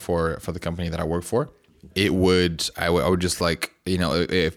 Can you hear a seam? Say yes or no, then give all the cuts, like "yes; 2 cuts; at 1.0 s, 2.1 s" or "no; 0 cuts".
yes; 1 cut; at 1.8 s